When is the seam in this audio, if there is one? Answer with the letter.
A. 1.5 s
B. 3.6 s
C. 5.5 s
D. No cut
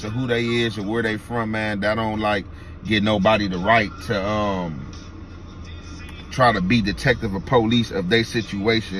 D